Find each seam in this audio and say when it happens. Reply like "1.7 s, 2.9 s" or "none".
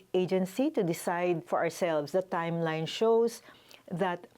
1.9 s